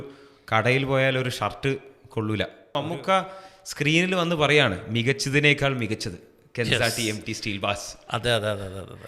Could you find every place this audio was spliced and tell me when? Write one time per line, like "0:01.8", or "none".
0:02.7